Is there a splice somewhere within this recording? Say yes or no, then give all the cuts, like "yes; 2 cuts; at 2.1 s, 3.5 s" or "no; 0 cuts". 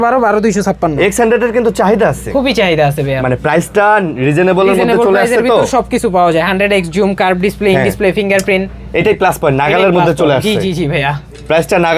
no; 0 cuts